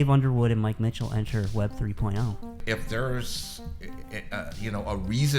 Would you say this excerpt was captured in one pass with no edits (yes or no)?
no